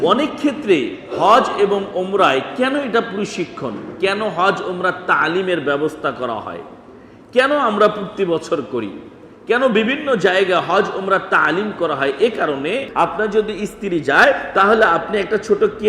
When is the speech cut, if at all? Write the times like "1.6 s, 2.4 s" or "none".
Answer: 12.9 s

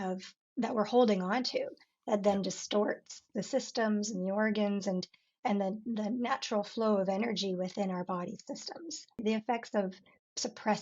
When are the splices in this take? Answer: 9.2 s

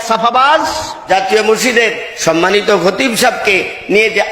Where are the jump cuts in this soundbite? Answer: 1.0 s

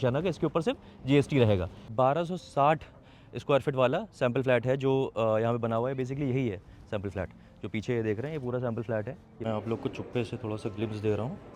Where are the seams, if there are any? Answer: 1.8 s, 9.4 s

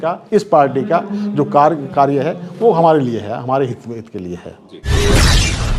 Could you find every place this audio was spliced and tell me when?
4.8 s

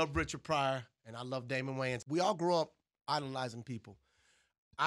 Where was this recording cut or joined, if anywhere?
2.0 s

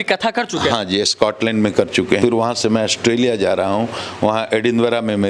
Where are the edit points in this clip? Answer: 2.2 s

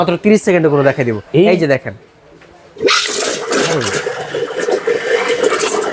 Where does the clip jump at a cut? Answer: none

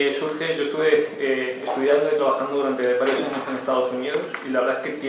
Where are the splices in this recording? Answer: none

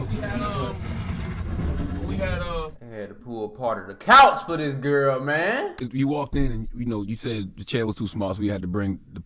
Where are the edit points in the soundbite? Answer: 5.8 s

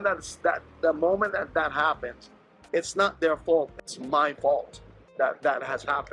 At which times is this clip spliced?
none

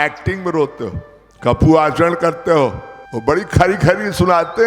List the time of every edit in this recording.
3.0 s

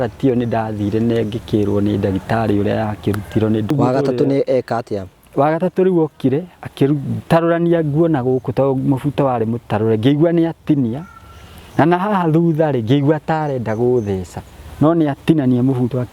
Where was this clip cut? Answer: 3.7 s

